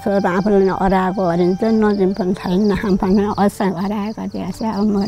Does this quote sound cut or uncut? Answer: uncut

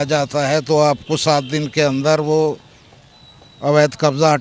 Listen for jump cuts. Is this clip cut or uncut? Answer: uncut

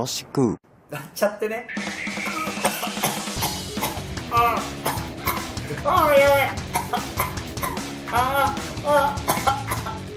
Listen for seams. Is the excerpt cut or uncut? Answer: cut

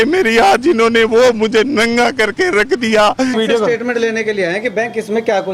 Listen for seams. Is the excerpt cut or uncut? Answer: cut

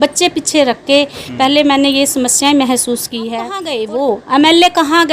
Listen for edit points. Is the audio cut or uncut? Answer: cut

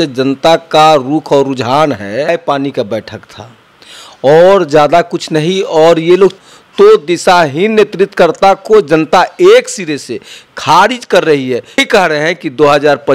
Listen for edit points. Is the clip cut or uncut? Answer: cut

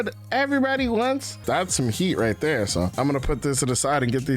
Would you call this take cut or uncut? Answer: cut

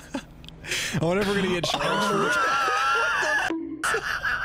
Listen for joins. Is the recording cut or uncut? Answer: uncut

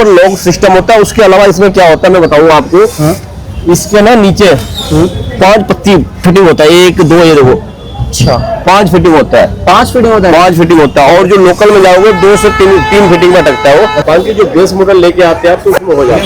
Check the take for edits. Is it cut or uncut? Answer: cut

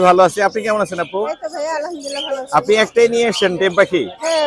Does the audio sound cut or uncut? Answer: uncut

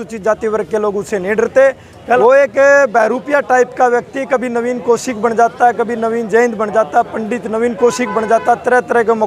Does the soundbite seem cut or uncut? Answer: cut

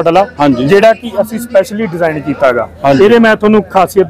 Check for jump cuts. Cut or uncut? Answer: uncut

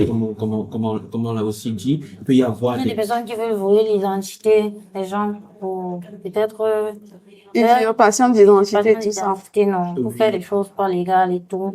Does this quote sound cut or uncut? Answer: uncut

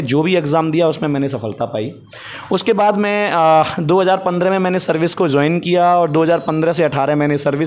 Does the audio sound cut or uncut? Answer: uncut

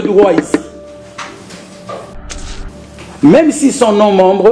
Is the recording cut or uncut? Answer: cut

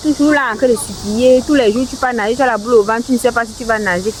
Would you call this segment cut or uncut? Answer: uncut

